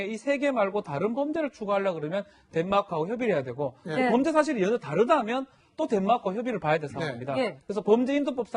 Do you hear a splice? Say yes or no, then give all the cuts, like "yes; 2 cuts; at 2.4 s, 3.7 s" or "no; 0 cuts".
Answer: yes; 1 cut; at 2.7 s